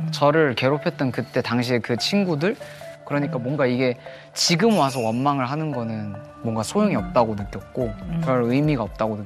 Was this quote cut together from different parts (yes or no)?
no